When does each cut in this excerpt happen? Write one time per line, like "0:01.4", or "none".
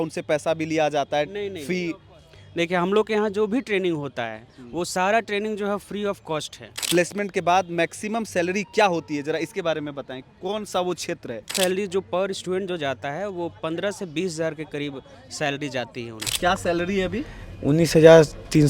0:06.7
0:11.5
0:16.3

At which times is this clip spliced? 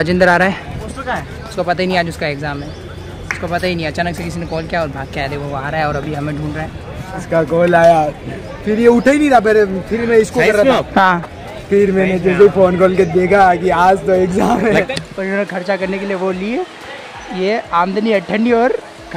0:00.9
0:07.1
0:14.9

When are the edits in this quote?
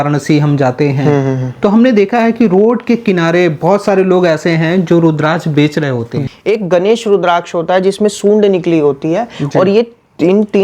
0:06.2

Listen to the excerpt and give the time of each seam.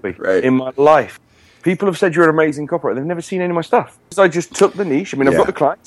0:01.1
0:04.0

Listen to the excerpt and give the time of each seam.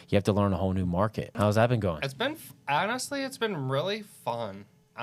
0:01.3

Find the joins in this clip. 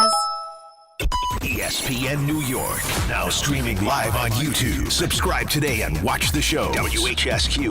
0:00.9

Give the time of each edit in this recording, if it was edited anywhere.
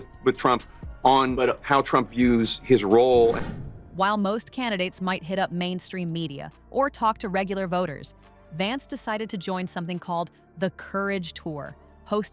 none

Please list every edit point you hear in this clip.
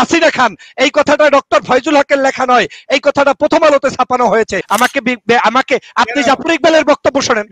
0:04.6

